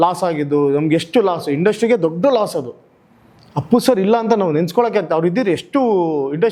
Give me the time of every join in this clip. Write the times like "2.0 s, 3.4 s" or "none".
none